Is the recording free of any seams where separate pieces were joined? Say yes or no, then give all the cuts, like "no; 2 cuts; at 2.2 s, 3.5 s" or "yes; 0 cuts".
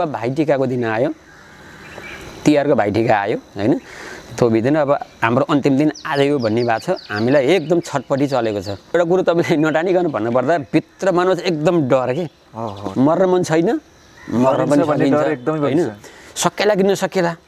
no; 1 cut; at 8.9 s